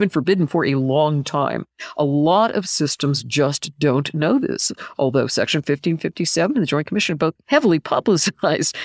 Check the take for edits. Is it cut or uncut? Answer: cut